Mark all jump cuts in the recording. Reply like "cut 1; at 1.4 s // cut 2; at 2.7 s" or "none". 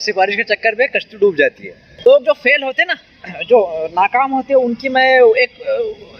cut 1; at 2.1 s